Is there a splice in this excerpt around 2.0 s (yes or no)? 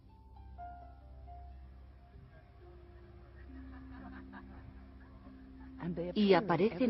no